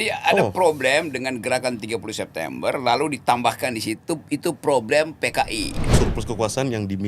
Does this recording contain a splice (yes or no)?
yes